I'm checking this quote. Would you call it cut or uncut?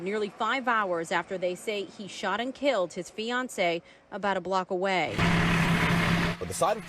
cut